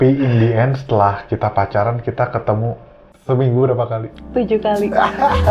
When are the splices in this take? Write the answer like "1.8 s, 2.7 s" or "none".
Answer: 3.1 s